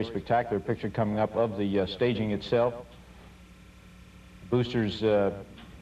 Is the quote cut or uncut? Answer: uncut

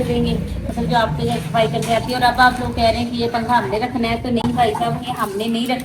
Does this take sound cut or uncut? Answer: uncut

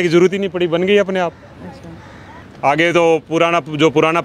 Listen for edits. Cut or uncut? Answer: uncut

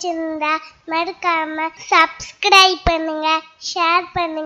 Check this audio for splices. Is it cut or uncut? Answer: cut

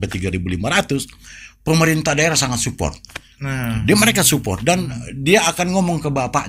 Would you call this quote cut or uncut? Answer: uncut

